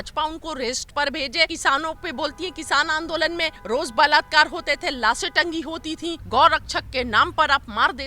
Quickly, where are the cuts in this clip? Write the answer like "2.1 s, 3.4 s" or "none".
1.5 s, 3.6 s, 6.2 s